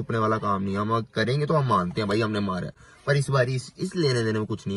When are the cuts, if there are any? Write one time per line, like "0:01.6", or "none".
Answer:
none

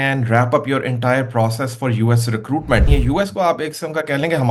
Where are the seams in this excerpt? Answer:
0:02.9

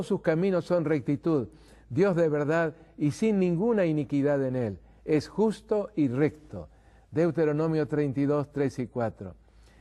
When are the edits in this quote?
none

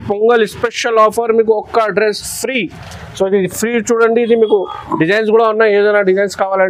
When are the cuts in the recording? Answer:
none

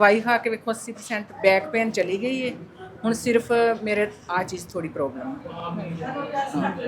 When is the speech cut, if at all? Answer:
none

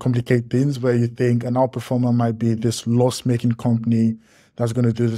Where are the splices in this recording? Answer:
none

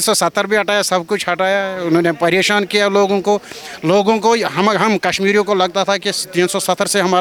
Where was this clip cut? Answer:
none

